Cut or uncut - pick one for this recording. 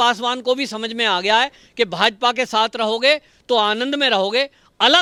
uncut